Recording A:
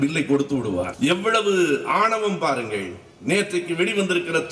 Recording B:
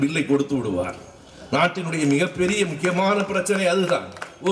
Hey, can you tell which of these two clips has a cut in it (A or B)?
A